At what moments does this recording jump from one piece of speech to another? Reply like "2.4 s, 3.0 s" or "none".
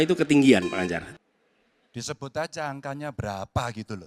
1.0 s